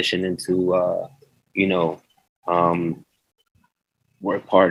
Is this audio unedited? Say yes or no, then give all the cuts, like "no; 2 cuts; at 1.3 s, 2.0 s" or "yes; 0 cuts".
yes; 0 cuts